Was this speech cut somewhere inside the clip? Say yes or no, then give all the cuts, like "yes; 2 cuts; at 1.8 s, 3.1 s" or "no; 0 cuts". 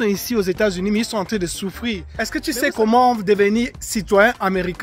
yes; 1 cut; at 2.0 s